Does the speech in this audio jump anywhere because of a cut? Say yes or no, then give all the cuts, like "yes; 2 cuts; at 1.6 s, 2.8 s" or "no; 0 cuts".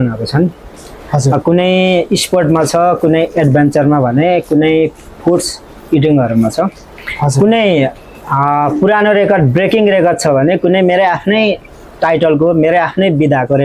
no; 0 cuts